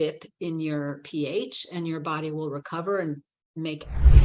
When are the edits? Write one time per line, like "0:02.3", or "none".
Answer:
none